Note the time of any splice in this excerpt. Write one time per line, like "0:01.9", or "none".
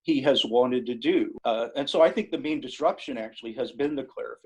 0:01.3